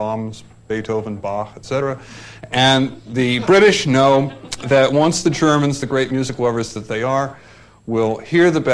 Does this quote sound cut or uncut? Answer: cut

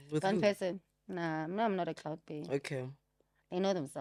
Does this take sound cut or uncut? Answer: uncut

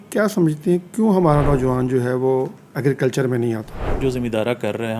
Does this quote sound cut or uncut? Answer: cut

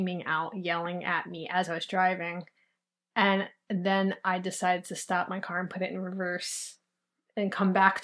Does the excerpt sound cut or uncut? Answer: uncut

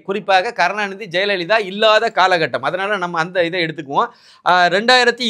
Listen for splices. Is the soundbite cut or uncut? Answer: uncut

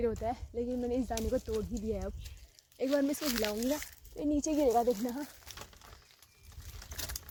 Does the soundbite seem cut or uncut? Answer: uncut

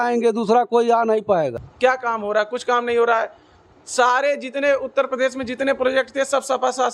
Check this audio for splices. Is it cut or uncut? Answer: cut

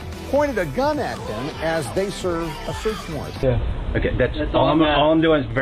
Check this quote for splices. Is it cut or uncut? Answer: cut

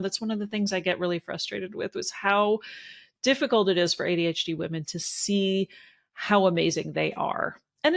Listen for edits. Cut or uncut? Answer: uncut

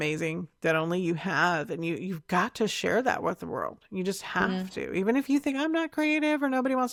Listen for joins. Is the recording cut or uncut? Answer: uncut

